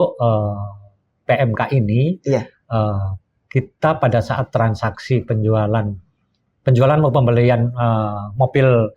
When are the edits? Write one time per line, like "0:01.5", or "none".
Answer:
none